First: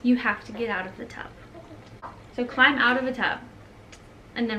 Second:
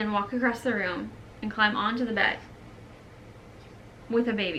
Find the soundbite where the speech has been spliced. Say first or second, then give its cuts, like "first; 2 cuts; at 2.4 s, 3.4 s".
first; 1 cut; at 2.2 s